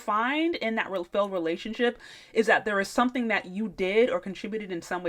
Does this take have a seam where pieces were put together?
no; 0 cuts

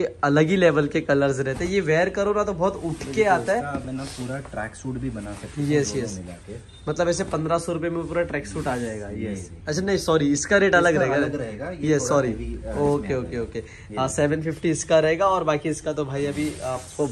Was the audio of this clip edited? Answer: no; 0 cuts

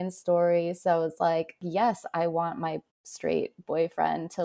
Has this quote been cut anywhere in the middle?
yes; 1 cut; at 1.6 s

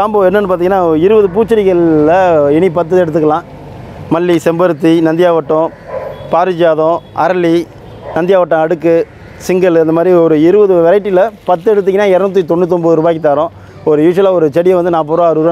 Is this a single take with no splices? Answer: yes; 0 cuts

